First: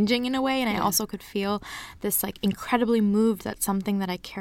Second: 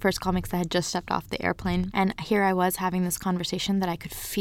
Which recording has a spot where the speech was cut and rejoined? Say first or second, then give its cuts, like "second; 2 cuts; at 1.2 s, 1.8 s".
second; 1 cut; at 1.9 s